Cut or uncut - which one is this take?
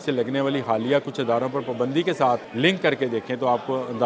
cut